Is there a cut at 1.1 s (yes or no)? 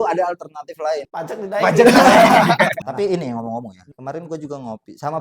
yes